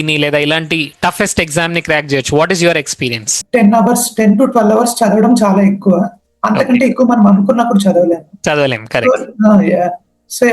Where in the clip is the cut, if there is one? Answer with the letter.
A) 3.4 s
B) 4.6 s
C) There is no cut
A